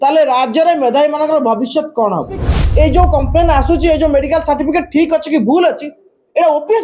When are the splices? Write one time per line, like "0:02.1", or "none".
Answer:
0:02.6